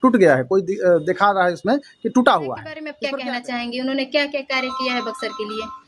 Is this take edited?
yes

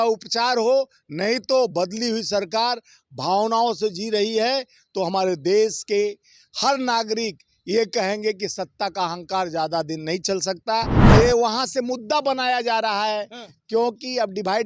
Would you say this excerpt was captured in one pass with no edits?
no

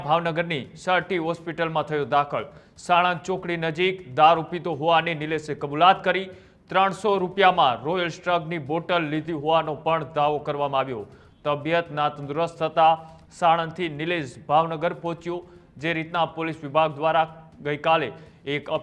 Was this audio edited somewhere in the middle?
no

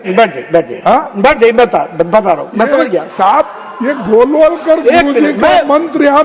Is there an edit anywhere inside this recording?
no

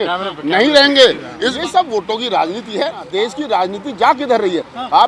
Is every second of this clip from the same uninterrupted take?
no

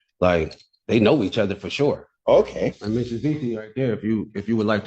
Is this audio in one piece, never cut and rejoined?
no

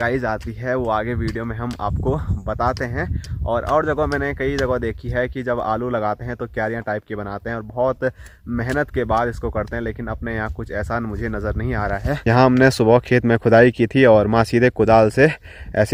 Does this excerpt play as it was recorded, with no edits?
yes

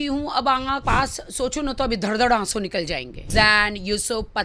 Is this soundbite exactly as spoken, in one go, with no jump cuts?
no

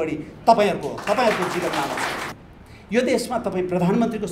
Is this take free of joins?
no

